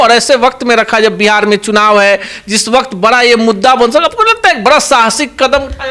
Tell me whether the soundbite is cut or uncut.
uncut